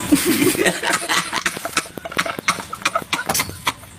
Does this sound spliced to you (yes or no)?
no